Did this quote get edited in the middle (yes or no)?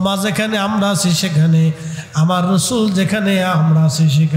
no